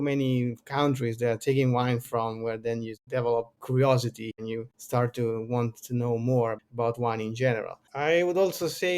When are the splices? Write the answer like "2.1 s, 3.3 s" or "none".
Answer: 3.3 s, 4.3 s, 7.8 s